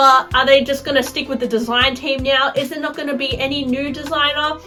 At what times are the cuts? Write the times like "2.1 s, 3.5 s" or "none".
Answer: none

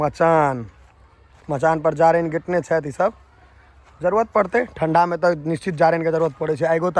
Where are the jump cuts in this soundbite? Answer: none

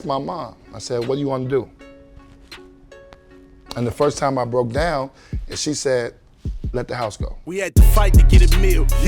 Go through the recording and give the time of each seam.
7.3 s

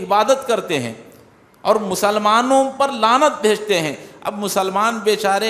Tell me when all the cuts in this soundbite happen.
none

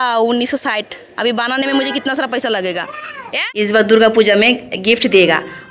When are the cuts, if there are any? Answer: 3.5 s

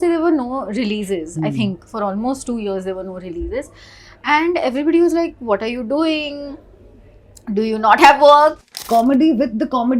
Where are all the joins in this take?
8.6 s

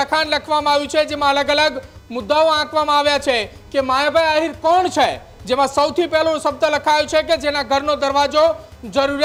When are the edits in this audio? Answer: none

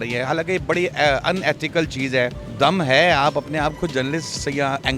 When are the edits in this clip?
2.4 s

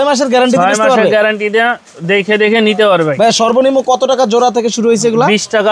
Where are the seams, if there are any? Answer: none

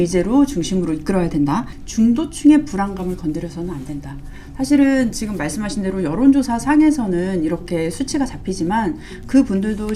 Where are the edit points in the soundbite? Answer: 1.8 s

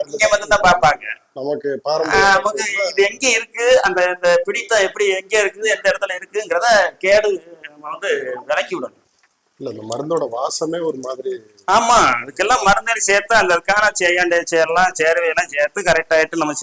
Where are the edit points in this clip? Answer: 9.0 s

